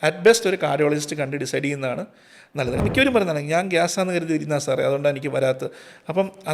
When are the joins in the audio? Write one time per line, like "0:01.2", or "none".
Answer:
0:02.8